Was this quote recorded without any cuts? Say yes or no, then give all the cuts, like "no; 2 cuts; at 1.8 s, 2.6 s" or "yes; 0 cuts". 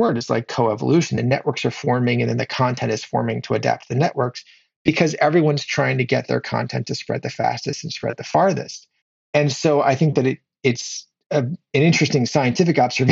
no; 1 cut; at 9.2 s